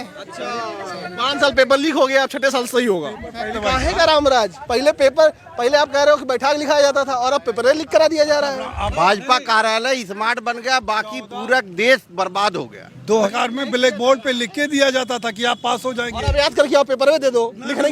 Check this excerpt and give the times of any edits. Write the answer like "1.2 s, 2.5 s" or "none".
3.6 s, 8.9 s, 13.3 s